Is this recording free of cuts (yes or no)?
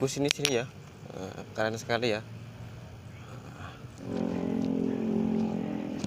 no